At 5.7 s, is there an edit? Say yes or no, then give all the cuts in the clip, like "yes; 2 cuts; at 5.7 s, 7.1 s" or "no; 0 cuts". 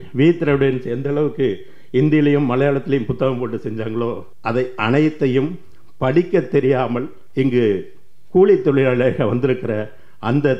no; 2 cuts; at 4.3 s, 7.2 s